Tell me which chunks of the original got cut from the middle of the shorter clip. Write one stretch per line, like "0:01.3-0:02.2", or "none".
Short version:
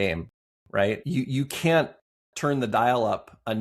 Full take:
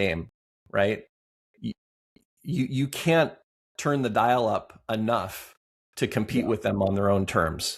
0:01.0-0:02.4